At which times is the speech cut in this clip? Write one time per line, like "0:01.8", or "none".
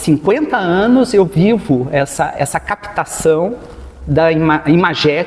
none